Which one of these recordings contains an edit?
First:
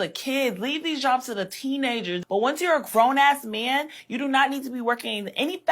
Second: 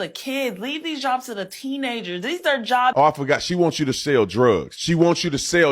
first; 1 cut; at 2.2 s

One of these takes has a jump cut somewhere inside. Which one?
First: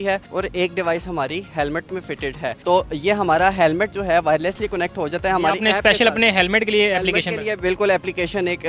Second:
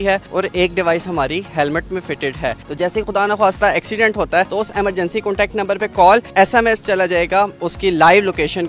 second; 4 cuts; at 2.6 s, 4.5 s, 6.3 s, 7.6 s

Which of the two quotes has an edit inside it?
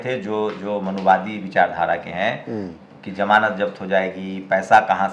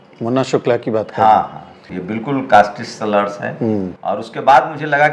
second; 2 cuts; at 1.9 s, 3.9 s

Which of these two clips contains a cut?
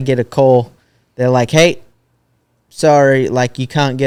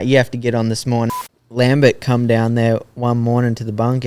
second; 1 cut; at 1.1 s

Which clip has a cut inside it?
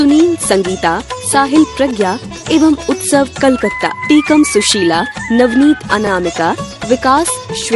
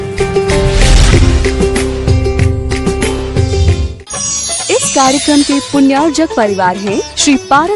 second; 1 cut; at 3.9 s

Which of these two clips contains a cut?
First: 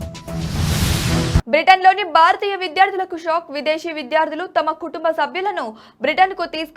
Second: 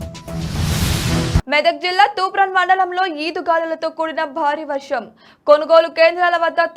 first; 1 cut; at 1.4 s

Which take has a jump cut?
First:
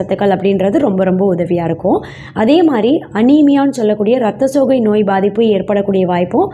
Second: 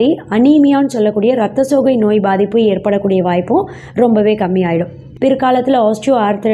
second; 1 cut; at 5.0 s

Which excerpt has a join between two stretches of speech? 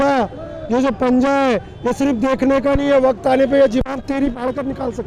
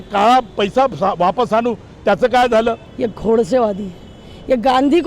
second; 1 cut; at 2.9 s

